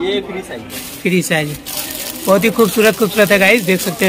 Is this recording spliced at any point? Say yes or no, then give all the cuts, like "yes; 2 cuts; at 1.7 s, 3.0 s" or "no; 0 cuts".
no; 0 cuts